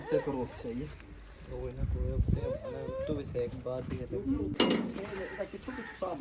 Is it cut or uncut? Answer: cut